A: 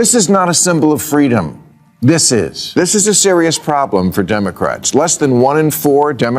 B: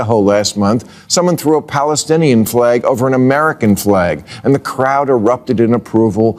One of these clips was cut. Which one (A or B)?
A